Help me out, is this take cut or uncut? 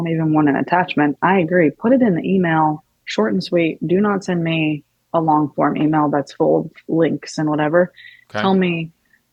uncut